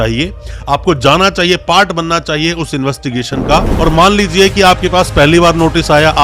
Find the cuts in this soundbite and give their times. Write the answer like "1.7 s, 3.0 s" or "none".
3.7 s